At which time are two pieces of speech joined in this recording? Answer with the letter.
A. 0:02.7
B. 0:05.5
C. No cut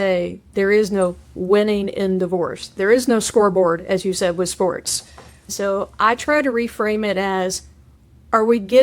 B